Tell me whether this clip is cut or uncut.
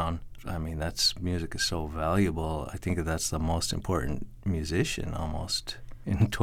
cut